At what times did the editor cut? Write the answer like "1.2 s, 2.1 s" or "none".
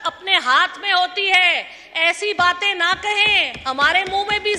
none